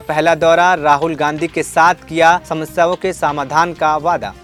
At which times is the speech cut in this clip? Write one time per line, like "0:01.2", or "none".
none